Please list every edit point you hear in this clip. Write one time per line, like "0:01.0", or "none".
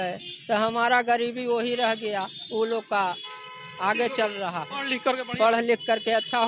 none